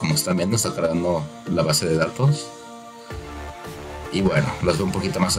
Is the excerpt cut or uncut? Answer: uncut